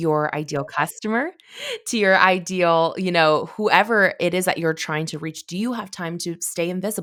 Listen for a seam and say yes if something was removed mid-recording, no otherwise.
no